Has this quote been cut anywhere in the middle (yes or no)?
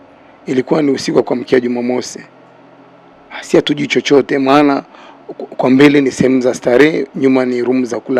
no